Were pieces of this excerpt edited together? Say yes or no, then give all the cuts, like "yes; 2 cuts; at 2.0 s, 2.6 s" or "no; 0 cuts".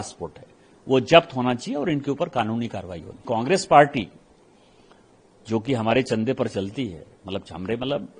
yes; 1 cut; at 3.2 s